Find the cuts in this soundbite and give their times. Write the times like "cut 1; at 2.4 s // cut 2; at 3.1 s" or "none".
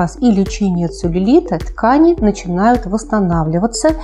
cut 1; at 1.7 s